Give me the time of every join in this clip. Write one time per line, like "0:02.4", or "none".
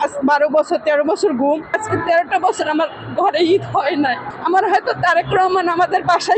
0:01.8